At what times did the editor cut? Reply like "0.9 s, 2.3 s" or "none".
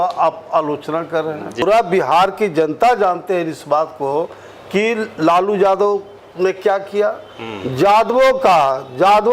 1.6 s